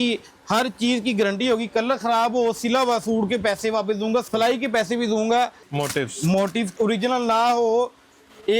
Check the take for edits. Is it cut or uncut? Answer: cut